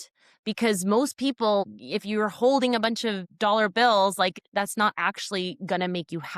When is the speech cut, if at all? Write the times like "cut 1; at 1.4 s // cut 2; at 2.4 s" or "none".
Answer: cut 1; at 1.7 s // cut 2; at 3.3 s // cut 3; at 4.3 s